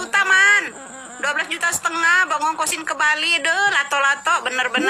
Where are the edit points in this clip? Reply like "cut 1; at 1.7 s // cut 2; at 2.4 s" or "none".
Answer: none